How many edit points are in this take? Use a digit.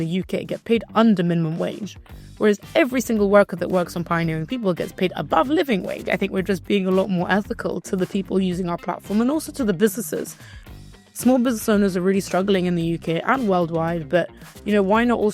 1